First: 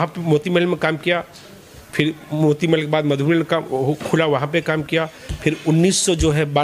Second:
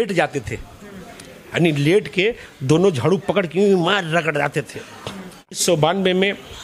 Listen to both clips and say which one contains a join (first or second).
second